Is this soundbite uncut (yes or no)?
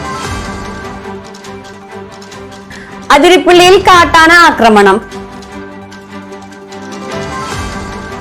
no